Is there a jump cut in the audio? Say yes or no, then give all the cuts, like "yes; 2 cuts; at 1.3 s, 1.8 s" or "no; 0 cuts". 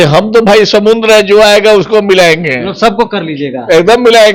no; 0 cuts